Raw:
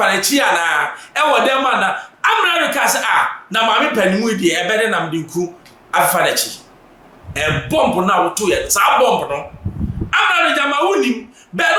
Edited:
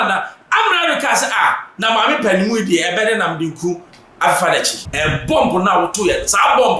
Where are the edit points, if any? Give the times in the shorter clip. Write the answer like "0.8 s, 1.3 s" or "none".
4.8 s